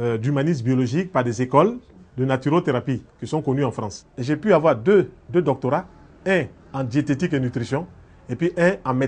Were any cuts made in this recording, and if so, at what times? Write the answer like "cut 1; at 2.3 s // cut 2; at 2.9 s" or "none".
cut 1; at 4.4 s